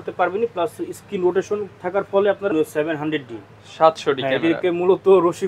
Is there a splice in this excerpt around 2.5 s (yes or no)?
yes